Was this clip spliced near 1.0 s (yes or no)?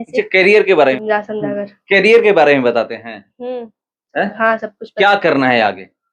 yes